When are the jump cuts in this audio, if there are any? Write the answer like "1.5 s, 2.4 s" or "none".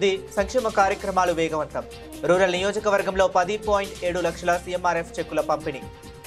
none